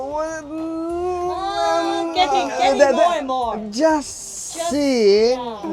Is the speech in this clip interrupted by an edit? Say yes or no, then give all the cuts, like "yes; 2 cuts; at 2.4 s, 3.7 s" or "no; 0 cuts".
no; 0 cuts